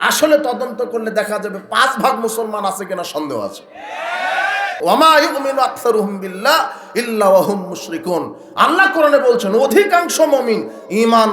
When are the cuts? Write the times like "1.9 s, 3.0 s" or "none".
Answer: 4.8 s